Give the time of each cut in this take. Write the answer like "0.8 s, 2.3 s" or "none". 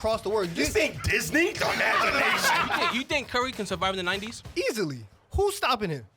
2.9 s, 4.8 s